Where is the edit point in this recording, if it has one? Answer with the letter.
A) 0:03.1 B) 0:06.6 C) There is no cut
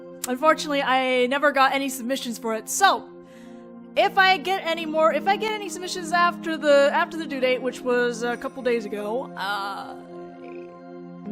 C